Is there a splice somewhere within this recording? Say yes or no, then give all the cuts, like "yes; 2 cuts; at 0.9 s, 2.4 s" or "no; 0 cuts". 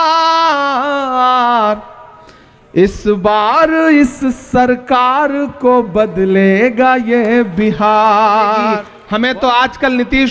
yes; 1 cut; at 8.9 s